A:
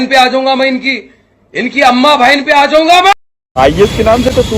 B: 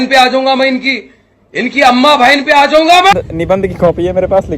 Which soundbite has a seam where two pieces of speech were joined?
B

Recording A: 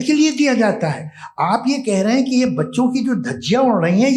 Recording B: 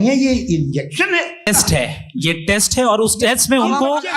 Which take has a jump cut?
B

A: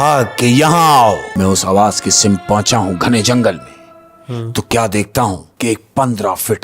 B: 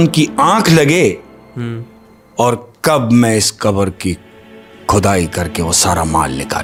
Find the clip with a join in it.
A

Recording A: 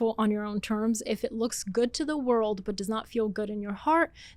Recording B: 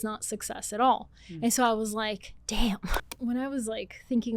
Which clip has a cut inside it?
B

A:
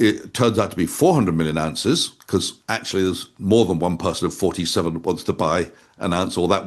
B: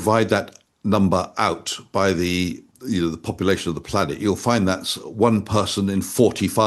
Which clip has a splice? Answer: B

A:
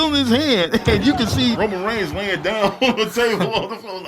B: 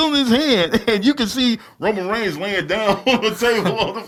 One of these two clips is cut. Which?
A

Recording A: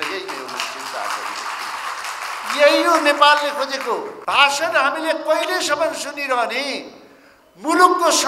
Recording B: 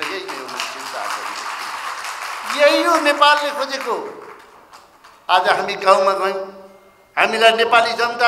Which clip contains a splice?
A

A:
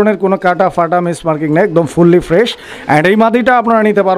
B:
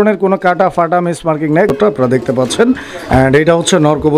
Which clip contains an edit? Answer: B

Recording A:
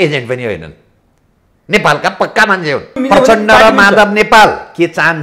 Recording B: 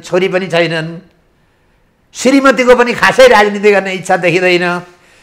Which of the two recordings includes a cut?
A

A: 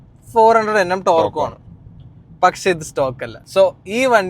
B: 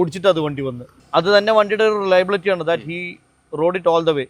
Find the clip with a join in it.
A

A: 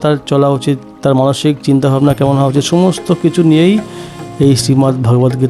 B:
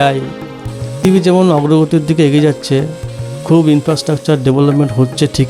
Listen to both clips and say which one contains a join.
B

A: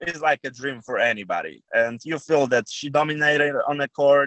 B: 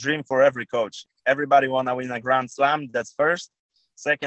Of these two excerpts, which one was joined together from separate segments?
B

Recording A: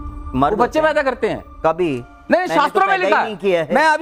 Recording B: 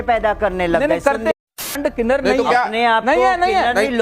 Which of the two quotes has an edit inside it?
B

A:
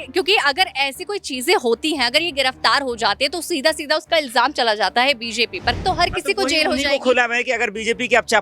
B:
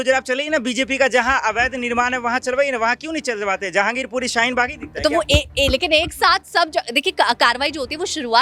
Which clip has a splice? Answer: A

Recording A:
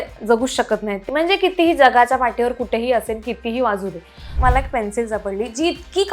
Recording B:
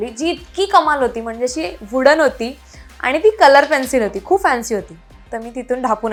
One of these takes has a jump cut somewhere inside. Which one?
A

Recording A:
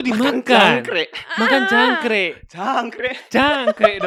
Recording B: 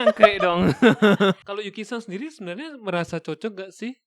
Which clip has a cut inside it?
B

